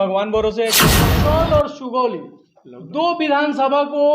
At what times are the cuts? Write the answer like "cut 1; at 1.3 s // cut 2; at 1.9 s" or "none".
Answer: cut 1; at 1.1 s